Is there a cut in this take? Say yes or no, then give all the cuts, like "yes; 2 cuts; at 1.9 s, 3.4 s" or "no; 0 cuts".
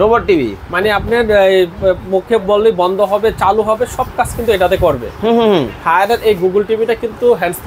no; 0 cuts